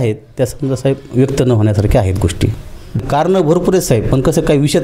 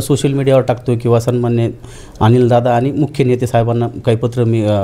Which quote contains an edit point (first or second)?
first